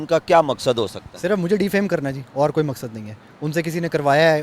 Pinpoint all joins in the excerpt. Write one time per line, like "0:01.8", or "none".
none